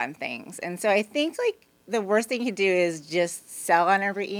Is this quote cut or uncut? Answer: uncut